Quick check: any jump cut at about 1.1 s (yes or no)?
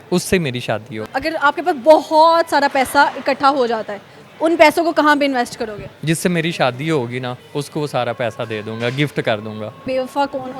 yes